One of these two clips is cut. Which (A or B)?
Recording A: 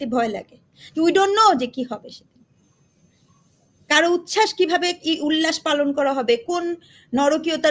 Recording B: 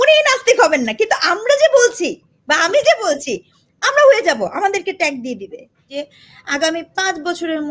B